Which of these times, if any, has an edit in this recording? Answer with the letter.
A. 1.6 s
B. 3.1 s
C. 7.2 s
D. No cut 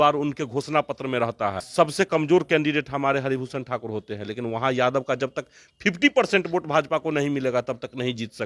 A